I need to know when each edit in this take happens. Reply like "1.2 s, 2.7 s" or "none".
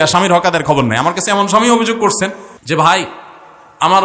2.5 s